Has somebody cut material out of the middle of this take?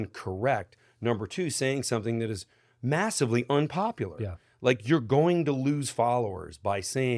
no; 0 cuts

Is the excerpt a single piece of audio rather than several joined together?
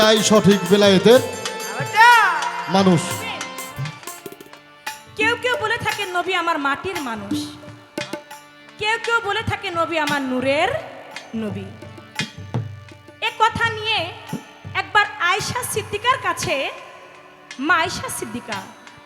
no; 1 cut; at 4.4 s

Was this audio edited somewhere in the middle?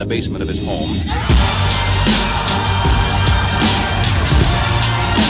no; 0 cuts

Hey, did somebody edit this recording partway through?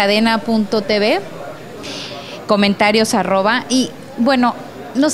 yes; 1 cut; at 3.2 s

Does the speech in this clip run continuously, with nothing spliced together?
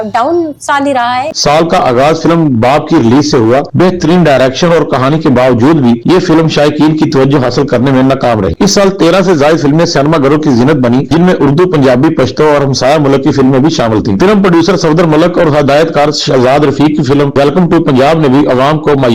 yes; 0 cuts

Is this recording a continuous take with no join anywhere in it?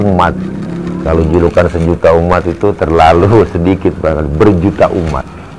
yes; 0 cuts

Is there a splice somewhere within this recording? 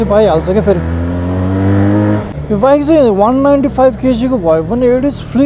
yes; 1 cut; at 2.3 s

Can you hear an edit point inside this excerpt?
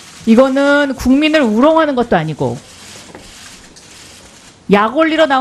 yes; 1 cut; at 2.1 s

